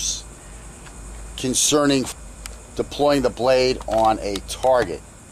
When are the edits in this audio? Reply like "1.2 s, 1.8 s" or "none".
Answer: none